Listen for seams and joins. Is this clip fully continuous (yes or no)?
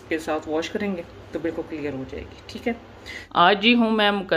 no